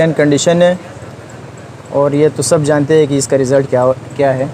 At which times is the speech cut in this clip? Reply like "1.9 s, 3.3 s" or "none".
none